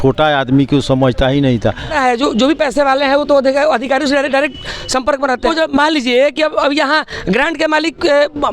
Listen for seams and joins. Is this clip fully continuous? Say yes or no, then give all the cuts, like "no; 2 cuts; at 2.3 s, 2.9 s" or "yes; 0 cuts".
no; 2 cuts; at 1.9 s, 5.5 s